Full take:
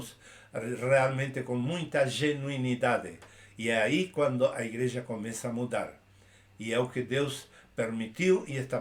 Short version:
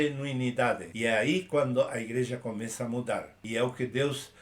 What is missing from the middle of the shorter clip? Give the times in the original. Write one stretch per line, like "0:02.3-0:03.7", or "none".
0:03.1-0:03.5
0:06.0-0:06.5